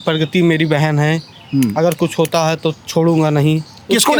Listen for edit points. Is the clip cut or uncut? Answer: uncut